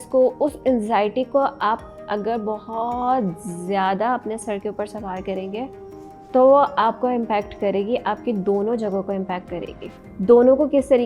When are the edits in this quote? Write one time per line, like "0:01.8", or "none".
0:09.8